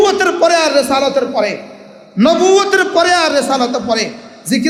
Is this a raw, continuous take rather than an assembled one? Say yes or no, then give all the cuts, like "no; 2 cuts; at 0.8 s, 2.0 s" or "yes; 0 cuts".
yes; 0 cuts